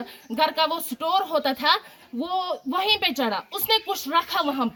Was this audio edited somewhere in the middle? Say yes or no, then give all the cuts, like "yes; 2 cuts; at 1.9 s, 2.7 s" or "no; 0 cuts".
no; 0 cuts